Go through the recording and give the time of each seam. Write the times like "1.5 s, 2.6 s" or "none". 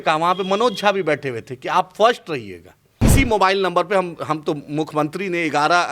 3.0 s